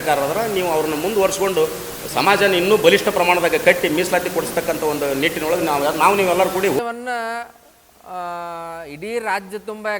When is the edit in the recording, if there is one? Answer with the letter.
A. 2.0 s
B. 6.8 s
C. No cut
B